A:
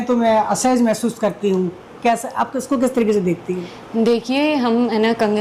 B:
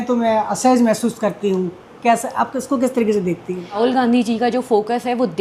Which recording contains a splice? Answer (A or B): B